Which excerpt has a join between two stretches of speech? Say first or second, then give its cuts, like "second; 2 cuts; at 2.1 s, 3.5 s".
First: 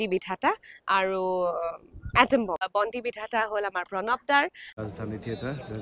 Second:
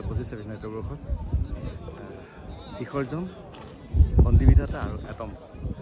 first; 2 cuts; at 2.7 s, 4.7 s